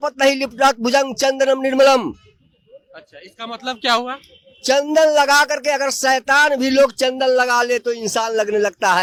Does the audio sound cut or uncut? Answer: uncut